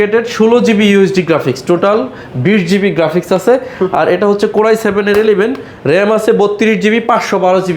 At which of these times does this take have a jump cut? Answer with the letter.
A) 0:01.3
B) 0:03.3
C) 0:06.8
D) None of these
D